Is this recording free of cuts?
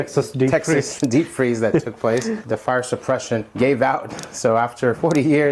yes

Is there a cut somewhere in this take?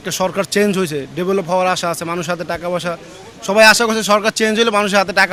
no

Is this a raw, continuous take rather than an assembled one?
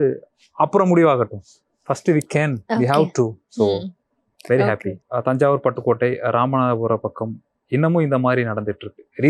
no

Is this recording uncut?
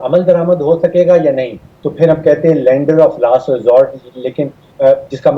no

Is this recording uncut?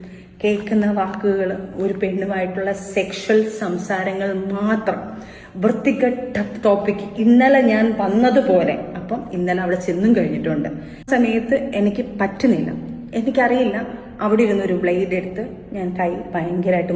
no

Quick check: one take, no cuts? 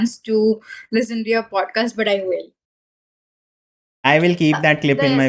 yes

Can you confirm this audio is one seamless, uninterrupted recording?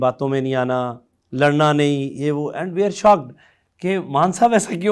yes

